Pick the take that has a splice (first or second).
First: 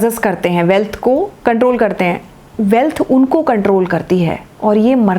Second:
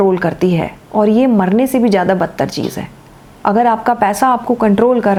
first